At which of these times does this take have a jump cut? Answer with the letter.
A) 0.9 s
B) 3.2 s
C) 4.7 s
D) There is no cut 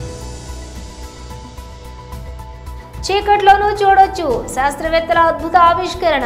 A